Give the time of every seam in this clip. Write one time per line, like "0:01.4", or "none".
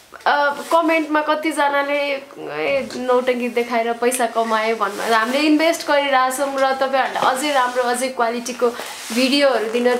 none